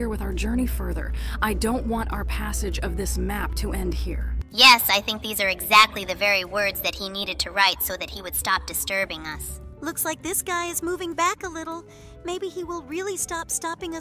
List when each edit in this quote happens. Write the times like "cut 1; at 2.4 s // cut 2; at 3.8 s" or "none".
none